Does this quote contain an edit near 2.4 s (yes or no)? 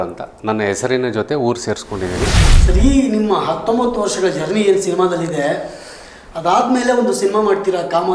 yes